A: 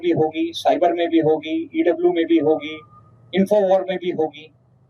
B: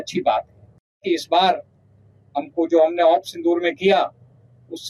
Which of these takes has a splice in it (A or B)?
B